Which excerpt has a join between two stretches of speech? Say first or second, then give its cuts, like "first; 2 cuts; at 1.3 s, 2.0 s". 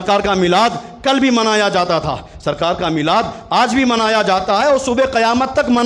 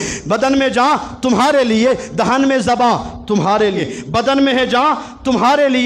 second; 1 cut; at 3.9 s